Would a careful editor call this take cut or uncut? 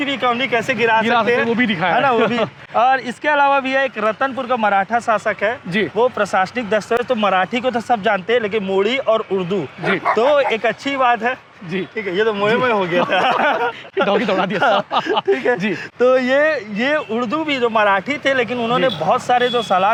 uncut